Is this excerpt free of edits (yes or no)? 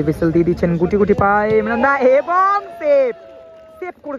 yes